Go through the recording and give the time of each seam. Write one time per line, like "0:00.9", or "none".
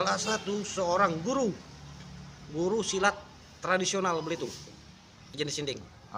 0:05.2